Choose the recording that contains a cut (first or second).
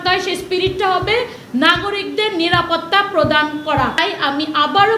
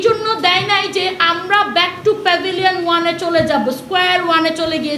first